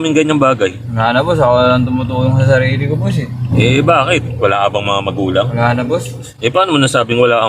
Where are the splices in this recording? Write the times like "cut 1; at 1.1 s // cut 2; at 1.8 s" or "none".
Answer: cut 1; at 6.2 s

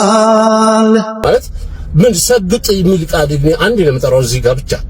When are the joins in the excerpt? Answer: cut 1; at 1.2 s

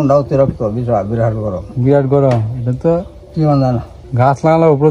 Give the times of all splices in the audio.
cut 1; at 4.0 s

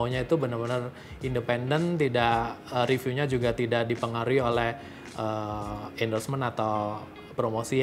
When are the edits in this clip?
none

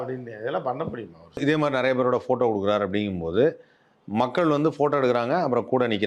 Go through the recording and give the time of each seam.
cut 1; at 1.4 s

